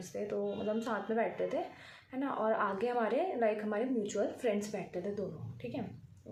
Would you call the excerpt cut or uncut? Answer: uncut